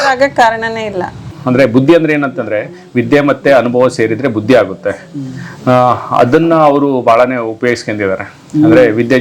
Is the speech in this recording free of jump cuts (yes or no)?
no